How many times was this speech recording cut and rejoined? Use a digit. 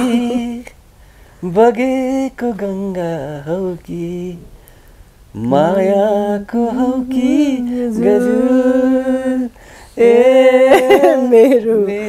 0